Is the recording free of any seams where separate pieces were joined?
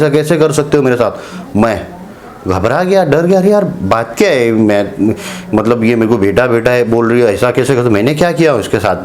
yes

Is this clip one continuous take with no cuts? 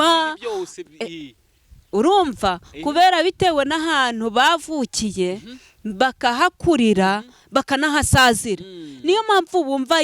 yes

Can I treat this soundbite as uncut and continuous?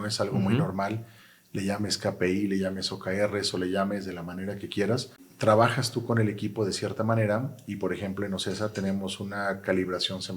no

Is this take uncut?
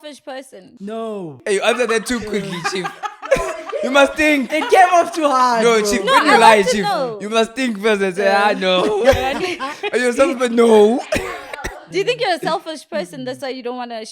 no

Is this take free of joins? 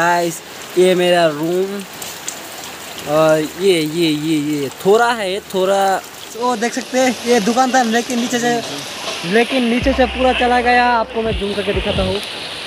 no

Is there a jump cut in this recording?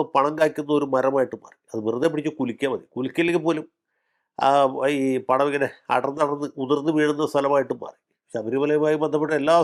no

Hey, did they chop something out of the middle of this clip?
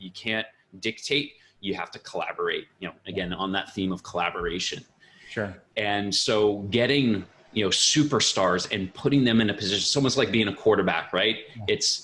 no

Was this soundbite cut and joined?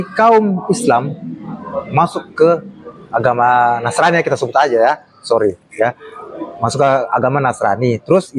no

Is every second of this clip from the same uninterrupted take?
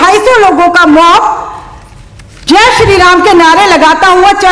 yes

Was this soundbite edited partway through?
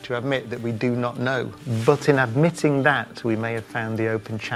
no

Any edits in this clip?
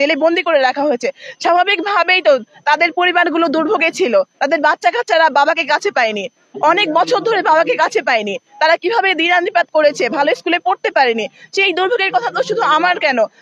no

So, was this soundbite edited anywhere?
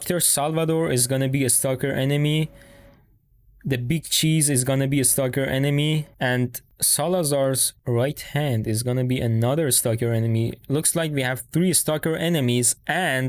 no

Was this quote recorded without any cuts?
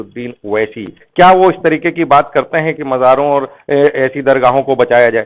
no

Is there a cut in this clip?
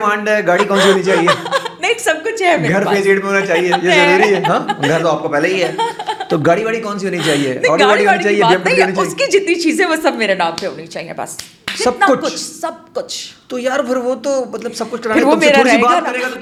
no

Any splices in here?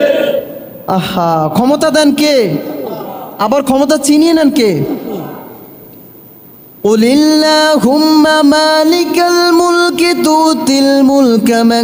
no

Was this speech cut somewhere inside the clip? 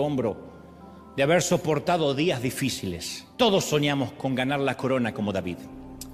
yes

